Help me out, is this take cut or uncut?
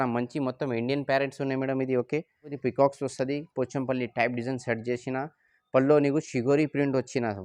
cut